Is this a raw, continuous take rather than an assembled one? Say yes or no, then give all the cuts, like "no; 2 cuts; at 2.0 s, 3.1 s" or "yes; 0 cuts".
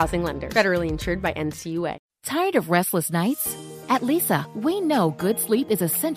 no; 1 cut; at 2.1 s